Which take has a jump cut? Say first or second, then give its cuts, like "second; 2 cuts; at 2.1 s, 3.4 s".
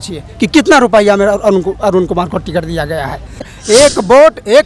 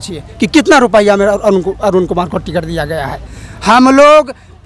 first; 1 cut; at 3.5 s